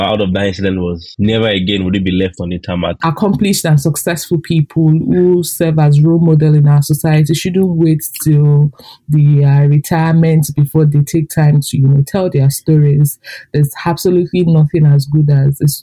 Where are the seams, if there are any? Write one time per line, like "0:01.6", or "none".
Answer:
0:03.0